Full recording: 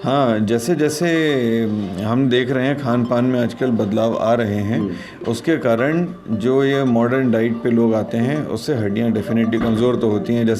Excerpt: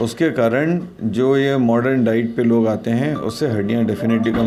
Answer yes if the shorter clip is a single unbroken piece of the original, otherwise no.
yes